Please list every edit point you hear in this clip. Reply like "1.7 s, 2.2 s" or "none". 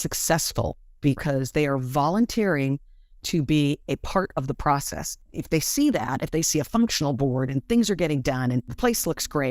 5.0 s, 8.7 s